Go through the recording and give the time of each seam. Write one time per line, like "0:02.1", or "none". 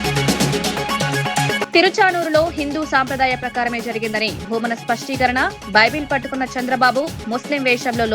0:01.7